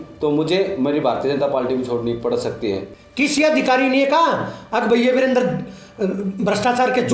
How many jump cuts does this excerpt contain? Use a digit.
1